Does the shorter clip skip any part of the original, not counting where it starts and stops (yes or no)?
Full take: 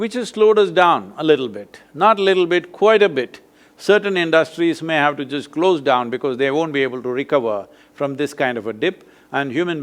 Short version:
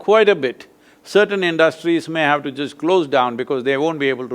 no